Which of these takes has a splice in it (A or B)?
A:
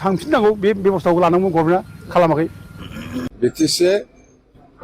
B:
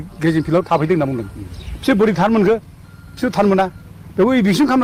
A